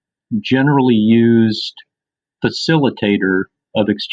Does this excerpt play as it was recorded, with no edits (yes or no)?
yes